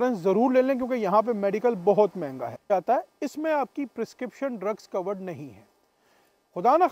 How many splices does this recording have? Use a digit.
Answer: 1